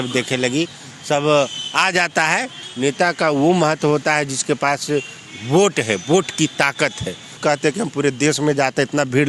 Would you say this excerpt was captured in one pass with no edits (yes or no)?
no